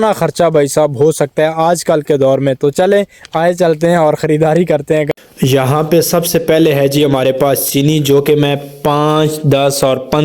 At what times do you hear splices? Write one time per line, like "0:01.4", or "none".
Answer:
0:05.1